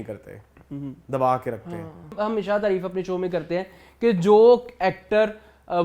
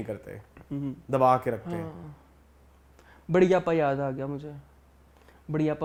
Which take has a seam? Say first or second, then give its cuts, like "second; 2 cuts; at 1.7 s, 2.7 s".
first; 1 cut; at 2.1 s